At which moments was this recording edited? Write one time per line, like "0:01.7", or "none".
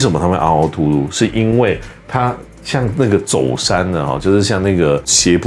none